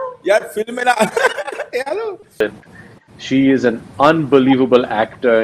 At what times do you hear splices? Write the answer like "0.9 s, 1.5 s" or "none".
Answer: 2.4 s